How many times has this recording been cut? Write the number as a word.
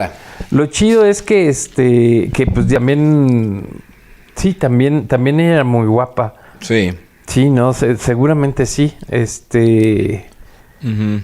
one